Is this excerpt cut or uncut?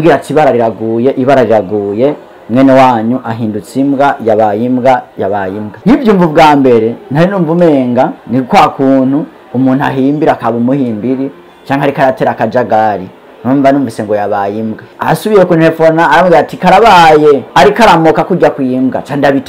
uncut